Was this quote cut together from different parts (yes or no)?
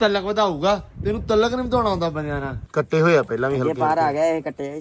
yes